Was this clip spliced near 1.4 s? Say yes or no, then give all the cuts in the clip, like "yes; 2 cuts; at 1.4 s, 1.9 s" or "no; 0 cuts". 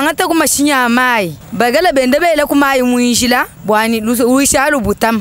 yes; 2 cuts; at 1.4 s, 3.5 s